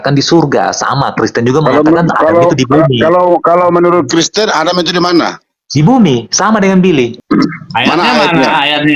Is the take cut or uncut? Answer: cut